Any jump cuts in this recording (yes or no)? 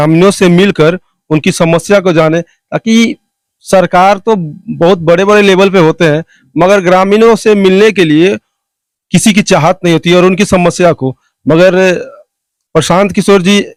no